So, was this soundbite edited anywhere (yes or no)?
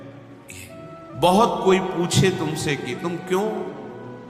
yes